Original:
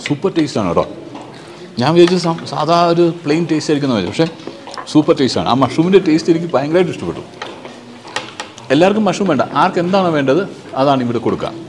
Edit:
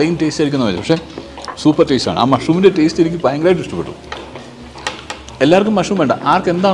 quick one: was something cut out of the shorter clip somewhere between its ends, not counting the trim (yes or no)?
no